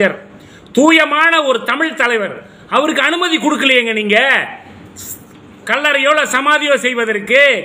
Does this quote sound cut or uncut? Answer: uncut